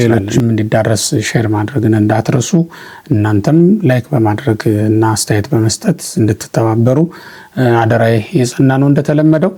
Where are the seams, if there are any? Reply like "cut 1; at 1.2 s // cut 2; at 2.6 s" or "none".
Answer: none